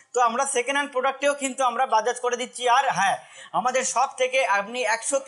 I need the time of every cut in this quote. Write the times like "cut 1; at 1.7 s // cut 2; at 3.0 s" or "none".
none